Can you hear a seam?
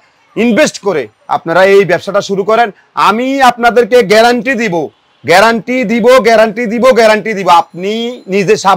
no; 0 cuts

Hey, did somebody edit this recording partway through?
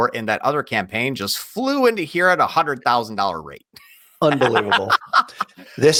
no; 0 cuts

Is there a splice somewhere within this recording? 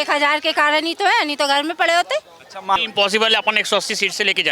yes; 1 cut; at 2.8 s

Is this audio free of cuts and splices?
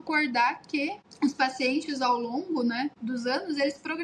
no; 2 cuts; at 1.0 s, 3.0 s

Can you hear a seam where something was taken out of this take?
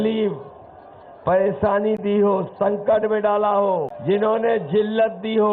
yes; 1 cut; at 3.9 s

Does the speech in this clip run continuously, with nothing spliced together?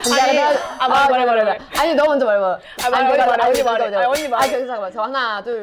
yes; 0 cuts

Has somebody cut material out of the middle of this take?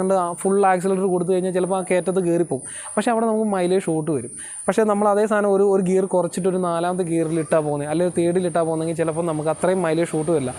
no; 0 cuts

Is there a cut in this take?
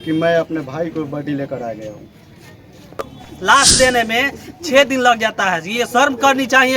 yes; 1 cut; at 3.1 s

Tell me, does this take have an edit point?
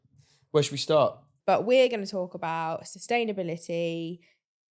yes; 1 cut; at 1.3 s

